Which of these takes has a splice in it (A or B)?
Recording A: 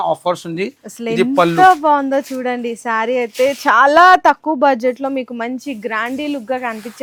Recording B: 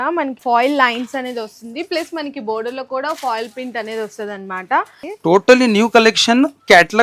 B